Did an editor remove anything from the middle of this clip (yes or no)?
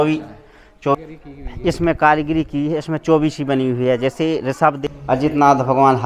yes